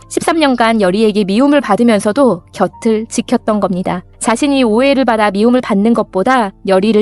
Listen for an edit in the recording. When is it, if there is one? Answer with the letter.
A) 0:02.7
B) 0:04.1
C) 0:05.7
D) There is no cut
B